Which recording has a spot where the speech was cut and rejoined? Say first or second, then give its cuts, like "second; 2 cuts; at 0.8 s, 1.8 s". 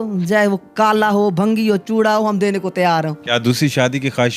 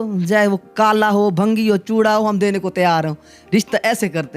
first; 1 cut; at 3.2 s